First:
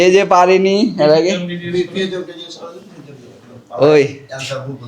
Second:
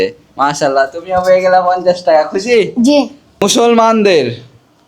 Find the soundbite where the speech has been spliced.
second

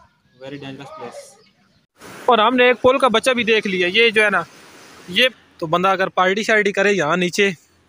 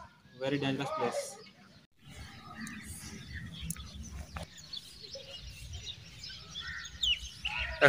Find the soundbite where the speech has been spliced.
first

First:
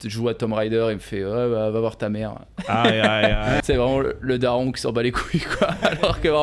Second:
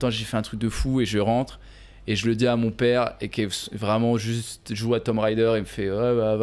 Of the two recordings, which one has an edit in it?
first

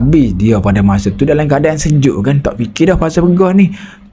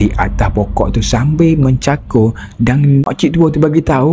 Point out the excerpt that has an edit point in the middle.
second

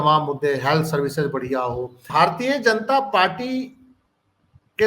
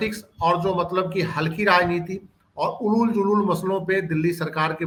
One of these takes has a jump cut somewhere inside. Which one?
first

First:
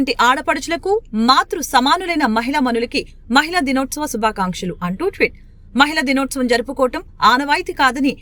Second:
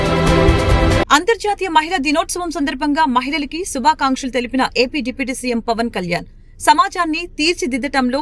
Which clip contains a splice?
second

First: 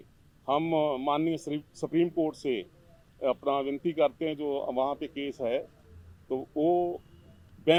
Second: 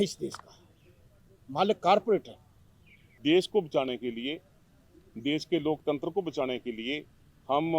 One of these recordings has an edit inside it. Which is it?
second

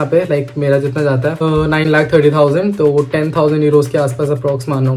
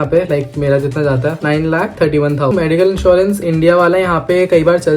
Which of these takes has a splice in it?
second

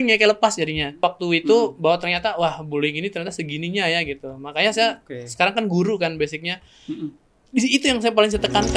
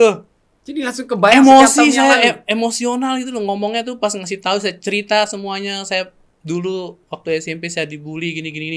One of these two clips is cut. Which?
first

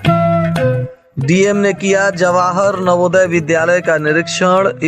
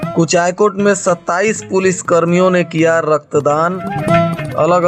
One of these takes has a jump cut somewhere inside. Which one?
first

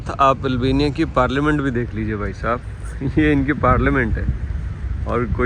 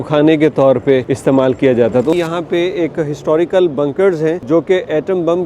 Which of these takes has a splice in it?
second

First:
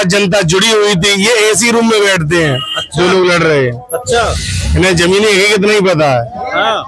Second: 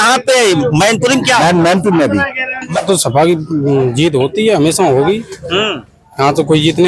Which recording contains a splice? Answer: second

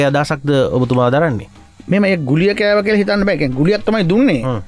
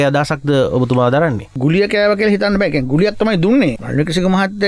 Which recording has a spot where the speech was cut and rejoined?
second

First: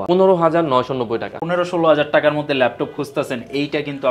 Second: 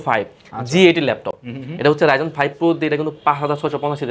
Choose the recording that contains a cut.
first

